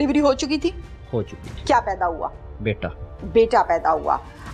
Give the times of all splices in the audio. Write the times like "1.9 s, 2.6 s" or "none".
none